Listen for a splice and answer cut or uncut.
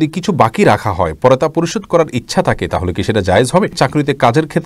cut